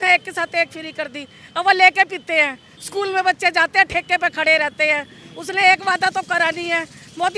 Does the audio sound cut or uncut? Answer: uncut